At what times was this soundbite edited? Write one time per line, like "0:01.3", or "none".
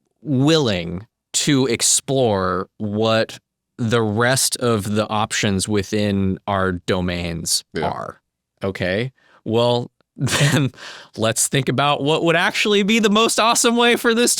0:08.1